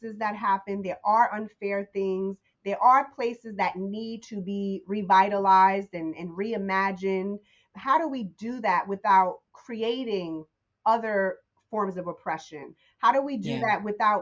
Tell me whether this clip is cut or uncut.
cut